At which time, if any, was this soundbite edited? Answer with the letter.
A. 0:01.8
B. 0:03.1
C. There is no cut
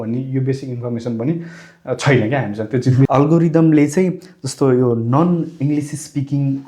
B